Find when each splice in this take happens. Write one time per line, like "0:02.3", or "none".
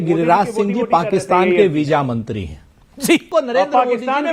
0:03.3